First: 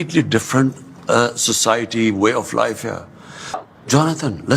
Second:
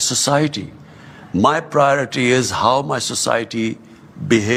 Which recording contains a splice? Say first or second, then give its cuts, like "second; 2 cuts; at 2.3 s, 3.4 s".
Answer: first; 1 cut; at 3.6 s